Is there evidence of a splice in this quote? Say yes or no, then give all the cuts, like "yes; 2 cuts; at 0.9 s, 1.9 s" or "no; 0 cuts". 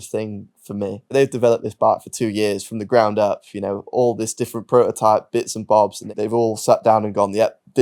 yes; 2 cuts; at 1.0 s, 6.0 s